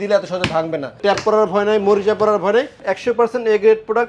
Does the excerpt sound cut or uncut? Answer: cut